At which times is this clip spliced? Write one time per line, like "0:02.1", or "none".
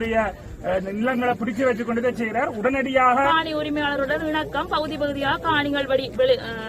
0:03.3